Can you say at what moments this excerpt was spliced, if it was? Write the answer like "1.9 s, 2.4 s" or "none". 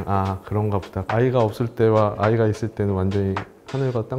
1.0 s